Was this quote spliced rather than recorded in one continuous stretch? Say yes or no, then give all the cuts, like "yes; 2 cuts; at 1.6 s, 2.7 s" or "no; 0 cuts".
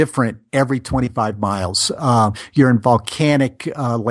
no; 0 cuts